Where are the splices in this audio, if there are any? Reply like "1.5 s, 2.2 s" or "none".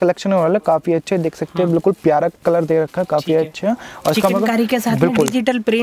none